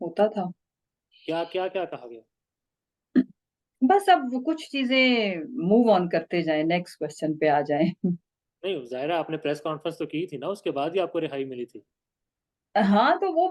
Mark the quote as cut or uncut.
uncut